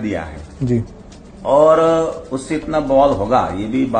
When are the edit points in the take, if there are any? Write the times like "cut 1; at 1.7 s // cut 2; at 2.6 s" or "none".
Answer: none